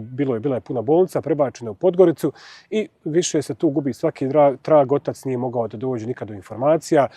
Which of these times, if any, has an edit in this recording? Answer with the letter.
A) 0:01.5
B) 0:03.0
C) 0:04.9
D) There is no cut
D